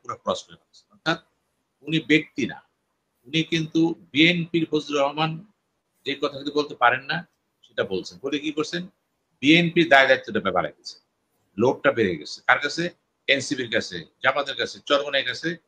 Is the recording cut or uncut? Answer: uncut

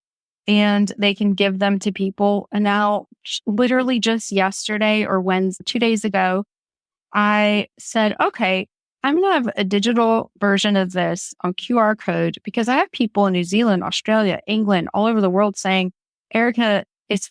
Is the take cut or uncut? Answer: uncut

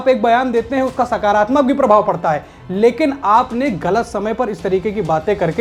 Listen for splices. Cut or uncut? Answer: uncut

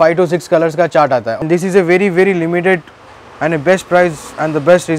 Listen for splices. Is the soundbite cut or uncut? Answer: cut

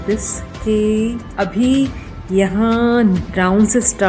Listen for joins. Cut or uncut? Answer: cut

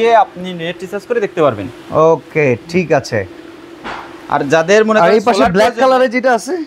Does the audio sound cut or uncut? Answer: uncut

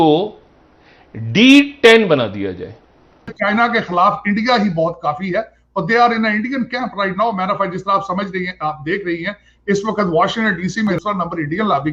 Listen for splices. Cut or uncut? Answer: cut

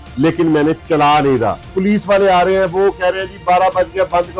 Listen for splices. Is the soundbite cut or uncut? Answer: cut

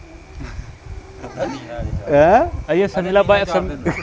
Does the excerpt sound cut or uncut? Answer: uncut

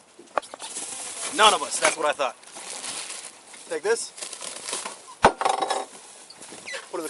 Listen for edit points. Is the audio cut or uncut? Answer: uncut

